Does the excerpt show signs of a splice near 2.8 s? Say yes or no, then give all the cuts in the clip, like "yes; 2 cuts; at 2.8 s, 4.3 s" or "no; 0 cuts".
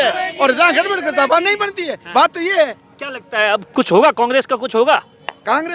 no; 0 cuts